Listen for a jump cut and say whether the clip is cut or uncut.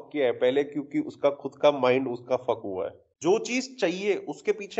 cut